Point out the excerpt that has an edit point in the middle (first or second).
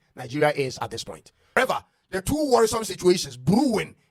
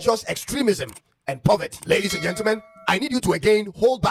first